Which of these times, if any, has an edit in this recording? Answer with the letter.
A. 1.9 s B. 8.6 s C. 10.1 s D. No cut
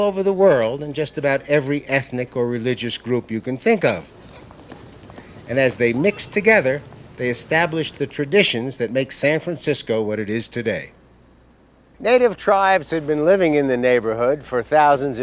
C